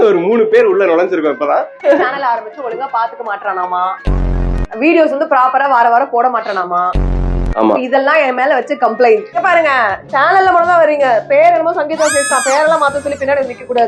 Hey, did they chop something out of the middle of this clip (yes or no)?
yes